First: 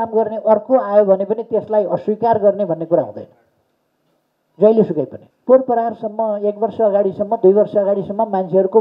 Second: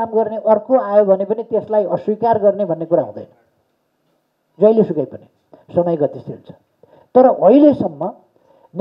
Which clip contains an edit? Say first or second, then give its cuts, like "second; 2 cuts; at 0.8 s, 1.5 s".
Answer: first; 1 cut; at 5.2 s